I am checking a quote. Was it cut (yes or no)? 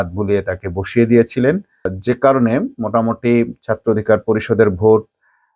no